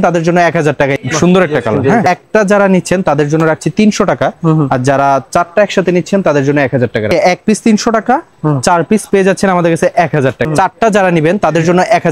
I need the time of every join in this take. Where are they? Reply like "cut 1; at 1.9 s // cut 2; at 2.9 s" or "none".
cut 1; at 1.0 s // cut 2; at 2.0 s // cut 3; at 7.1 s // cut 4; at 10.5 s